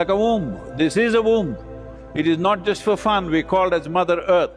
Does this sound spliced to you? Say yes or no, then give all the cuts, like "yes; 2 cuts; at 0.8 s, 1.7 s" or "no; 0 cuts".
no; 0 cuts